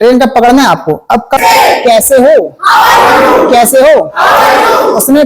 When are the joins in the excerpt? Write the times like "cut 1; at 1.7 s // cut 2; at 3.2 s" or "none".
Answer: cut 1; at 1.4 s